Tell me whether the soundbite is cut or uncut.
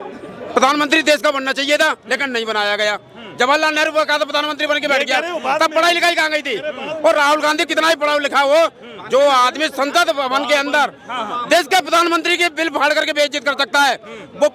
uncut